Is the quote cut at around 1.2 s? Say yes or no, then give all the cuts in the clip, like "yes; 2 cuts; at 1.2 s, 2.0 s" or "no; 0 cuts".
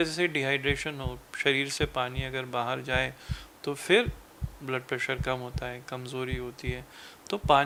no; 0 cuts